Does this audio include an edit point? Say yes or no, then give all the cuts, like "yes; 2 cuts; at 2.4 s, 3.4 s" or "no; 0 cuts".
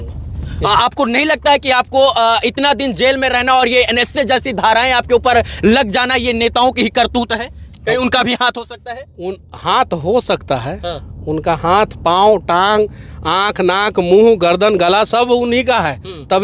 no; 0 cuts